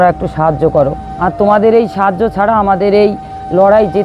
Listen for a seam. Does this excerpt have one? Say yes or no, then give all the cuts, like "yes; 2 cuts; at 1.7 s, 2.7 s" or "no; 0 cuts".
yes; 1 cut; at 1.1 s